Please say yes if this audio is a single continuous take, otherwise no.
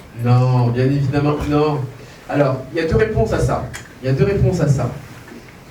yes